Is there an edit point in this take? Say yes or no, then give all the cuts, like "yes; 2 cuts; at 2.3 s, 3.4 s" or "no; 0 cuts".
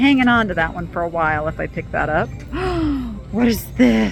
no; 0 cuts